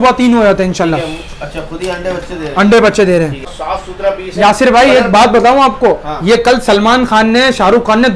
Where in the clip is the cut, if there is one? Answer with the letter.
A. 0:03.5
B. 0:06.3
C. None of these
A